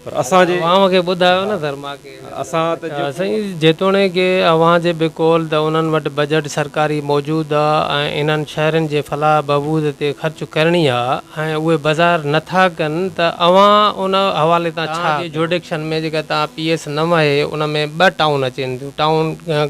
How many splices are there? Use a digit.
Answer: 2